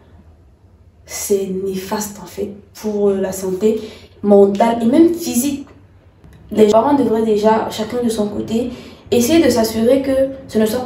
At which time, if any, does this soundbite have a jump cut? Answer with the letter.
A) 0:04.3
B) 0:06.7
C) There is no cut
B